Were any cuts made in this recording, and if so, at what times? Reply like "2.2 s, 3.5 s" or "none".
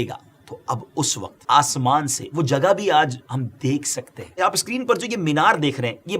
1.4 s, 4.4 s